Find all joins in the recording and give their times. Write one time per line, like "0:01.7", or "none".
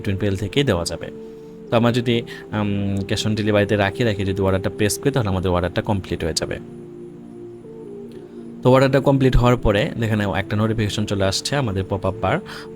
0:06.6
0:08.6